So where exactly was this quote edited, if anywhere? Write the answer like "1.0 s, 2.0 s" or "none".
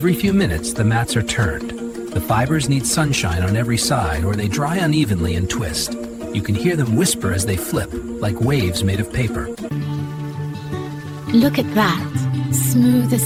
none